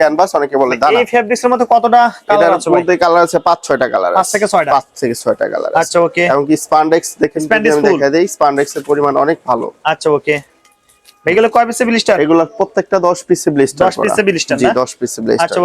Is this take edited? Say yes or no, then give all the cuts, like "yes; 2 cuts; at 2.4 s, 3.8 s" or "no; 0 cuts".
no; 0 cuts